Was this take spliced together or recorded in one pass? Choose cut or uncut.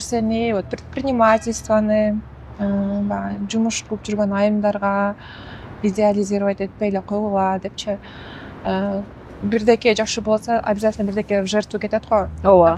uncut